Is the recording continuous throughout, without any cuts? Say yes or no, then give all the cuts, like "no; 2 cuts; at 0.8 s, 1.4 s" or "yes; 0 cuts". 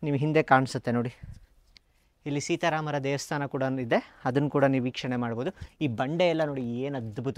yes; 0 cuts